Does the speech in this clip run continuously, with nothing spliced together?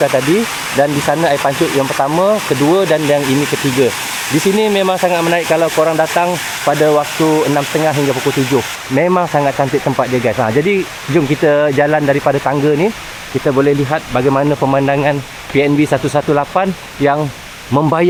yes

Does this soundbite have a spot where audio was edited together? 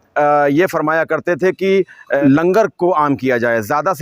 yes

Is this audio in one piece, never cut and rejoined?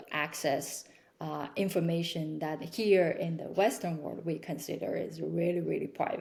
yes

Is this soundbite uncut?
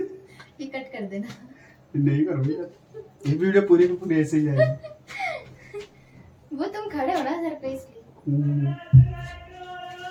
yes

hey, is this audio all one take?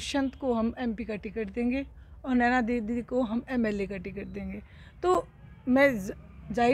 yes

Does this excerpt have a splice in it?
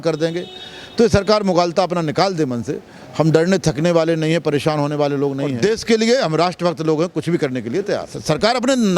yes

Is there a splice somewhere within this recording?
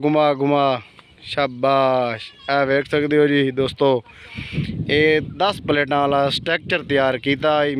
no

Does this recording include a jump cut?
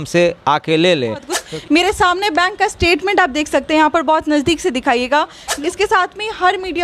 yes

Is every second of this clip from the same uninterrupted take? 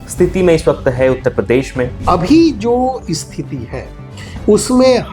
no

